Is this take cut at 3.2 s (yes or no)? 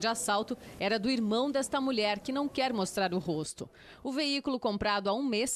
yes